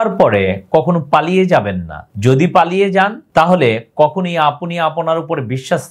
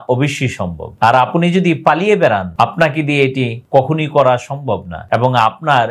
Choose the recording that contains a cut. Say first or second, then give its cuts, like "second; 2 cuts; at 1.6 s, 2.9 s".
second; 1 cut; at 2.5 s